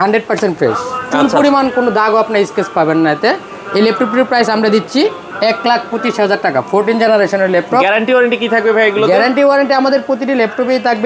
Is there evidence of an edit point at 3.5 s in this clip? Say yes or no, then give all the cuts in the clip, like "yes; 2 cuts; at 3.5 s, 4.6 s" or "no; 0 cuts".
no; 0 cuts